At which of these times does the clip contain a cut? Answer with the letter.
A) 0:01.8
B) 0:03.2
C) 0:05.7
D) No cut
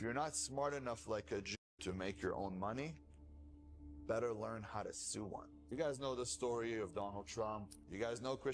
C